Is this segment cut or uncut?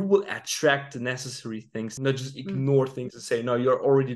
cut